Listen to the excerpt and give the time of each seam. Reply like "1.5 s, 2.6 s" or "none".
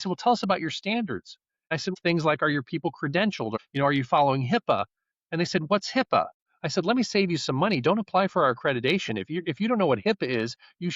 1.9 s, 3.5 s, 6.4 s